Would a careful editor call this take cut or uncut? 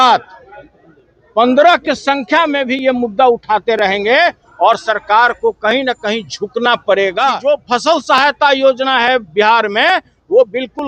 cut